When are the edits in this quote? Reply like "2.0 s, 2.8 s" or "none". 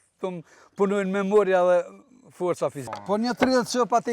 2.8 s